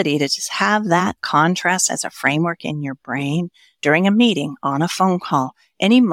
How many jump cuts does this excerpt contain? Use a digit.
0